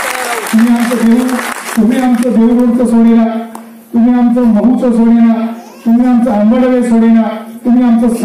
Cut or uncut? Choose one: uncut